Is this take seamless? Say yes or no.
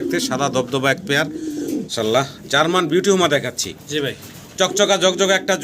no